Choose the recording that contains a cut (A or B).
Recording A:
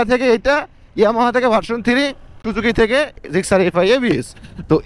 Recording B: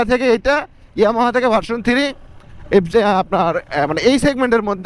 A